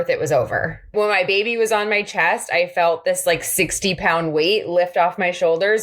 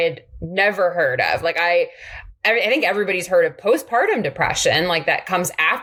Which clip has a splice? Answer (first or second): first